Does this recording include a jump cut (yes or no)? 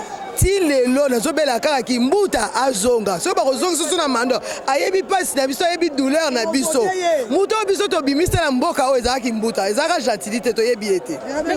no